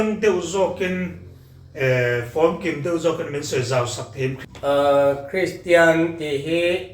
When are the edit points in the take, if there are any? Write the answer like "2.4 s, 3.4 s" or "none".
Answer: 4.4 s